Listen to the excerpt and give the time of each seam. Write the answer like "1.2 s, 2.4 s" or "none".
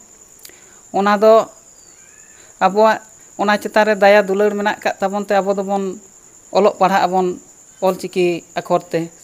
none